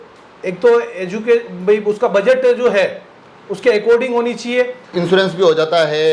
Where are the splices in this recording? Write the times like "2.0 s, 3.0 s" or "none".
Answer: 4.8 s